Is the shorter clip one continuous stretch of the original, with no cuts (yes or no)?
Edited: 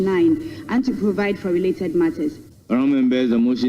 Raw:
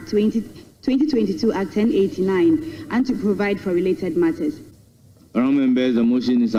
no